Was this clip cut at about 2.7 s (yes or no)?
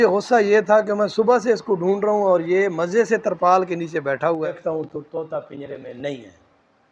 no